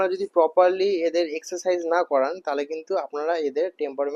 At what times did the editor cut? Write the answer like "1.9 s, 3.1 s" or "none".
none